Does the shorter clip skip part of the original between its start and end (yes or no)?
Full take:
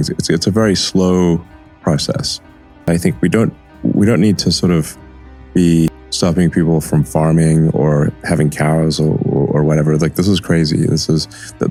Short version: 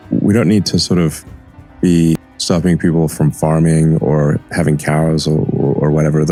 no